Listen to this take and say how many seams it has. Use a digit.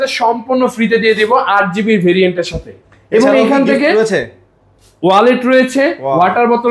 0